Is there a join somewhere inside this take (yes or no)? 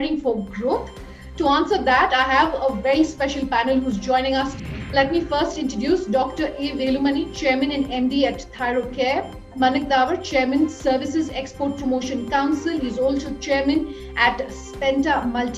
yes